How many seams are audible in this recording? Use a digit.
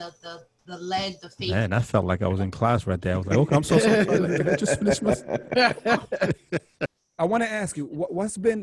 1